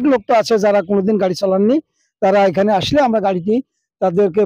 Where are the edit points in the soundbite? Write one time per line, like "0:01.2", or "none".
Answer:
none

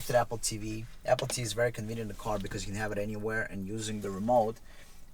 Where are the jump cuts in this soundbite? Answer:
none

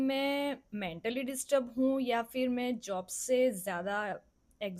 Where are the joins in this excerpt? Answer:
none

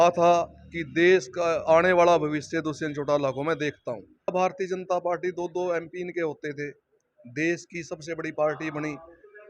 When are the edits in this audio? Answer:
0:04.3

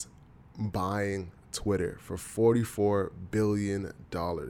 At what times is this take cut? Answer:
none

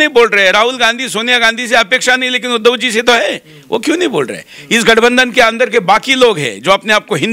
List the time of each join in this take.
none

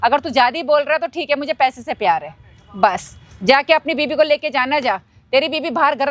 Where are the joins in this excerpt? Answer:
none

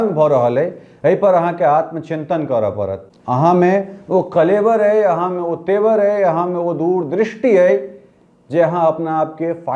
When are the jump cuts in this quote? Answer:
0:03.1

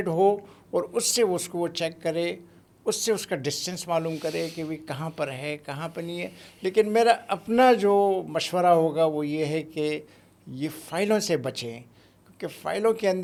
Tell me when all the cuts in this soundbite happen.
none

